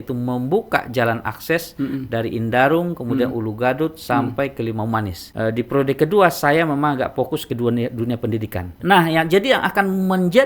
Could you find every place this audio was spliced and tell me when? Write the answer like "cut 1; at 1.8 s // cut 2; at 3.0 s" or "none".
cut 1; at 5.2 s // cut 2; at 8.7 s